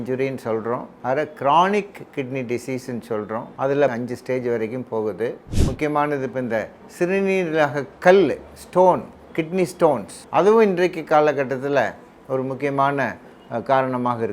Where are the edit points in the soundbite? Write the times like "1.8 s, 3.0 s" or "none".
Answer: 0.9 s, 3.8 s, 5.5 s, 10.1 s